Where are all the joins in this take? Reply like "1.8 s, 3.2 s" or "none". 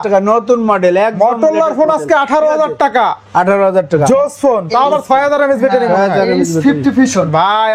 none